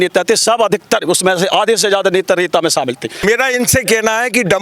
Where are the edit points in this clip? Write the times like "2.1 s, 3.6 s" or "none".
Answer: 3.2 s